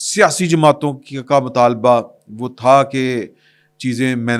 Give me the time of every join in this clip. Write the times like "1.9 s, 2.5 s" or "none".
none